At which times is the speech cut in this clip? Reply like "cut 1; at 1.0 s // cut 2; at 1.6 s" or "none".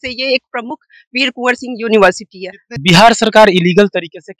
cut 1; at 2.8 s

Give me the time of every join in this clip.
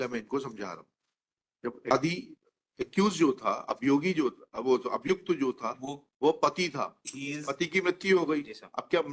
cut 1; at 1.9 s

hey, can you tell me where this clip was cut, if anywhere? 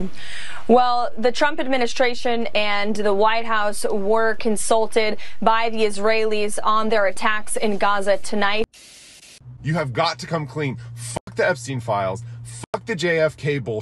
cut 1; at 8.9 s

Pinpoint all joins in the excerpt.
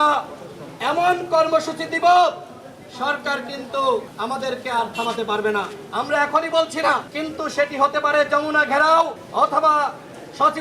cut 1; at 4.1 s // cut 2; at 7.2 s // cut 3; at 9.2 s

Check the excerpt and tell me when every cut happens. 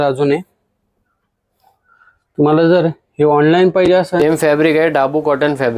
cut 1; at 4.2 s

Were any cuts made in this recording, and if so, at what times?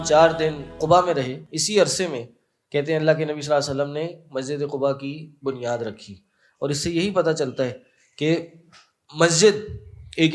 cut 1; at 0.8 s // cut 2; at 1.5 s

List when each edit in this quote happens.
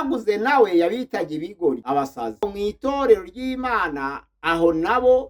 cut 1; at 2.5 s

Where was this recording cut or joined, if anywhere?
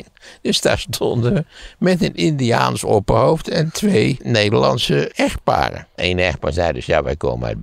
cut 1; at 4.2 s // cut 2; at 5.1 s // cut 3; at 5.9 s

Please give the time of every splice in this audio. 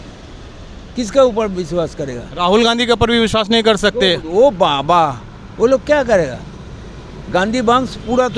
none

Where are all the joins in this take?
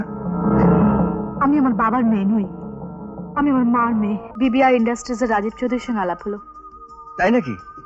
cut 1; at 4.3 s

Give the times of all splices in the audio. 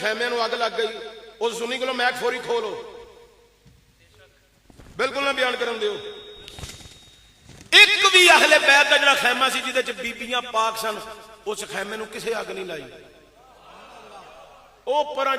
none

